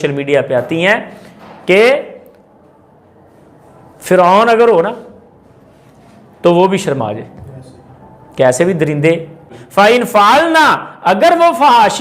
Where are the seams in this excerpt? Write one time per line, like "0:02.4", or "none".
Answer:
0:09.5